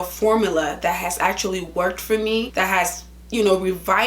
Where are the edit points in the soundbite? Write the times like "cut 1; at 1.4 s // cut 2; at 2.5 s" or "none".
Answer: cut 1; at 2.5 s